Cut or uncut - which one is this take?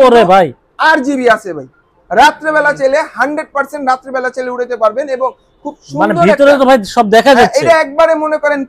uncut